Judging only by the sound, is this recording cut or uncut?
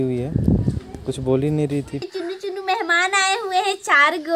cut